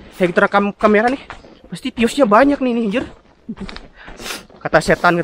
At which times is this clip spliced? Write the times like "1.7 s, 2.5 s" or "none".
none